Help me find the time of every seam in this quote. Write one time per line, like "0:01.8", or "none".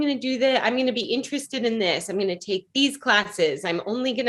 none